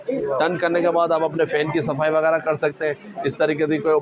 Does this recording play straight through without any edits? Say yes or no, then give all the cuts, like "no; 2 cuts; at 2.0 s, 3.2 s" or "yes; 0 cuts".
yes; 0 cuts